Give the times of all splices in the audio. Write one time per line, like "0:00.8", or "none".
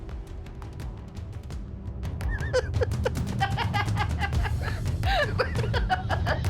none

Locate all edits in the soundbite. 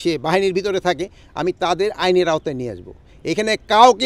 none

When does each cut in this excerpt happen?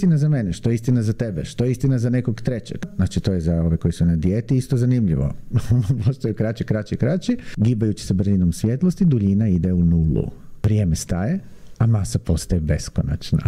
0:02.9
0:07.5
0:10.5

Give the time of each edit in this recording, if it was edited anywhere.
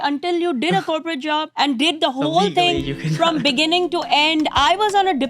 0:01.5

